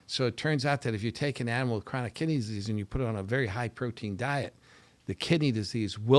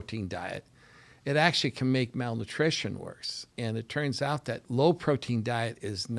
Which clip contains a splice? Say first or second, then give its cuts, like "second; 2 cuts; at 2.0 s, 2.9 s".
second; 2 cuts; at 3.4 s, 4.6 s